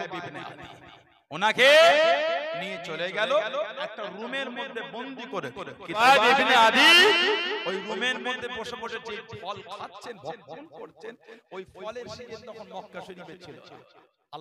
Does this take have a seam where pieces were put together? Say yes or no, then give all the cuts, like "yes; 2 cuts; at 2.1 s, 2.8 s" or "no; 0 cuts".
yes; 1 cut; at 6.0 s